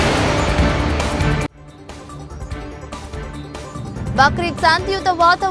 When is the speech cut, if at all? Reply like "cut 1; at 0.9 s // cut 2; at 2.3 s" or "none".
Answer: cut 1; at 3.1 s // cut 2; at 4.0 s